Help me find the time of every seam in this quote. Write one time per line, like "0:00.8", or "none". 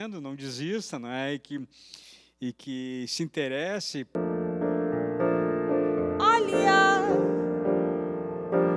0:04.2